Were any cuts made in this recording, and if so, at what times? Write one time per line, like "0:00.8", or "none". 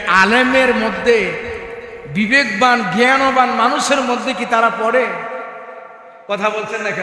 none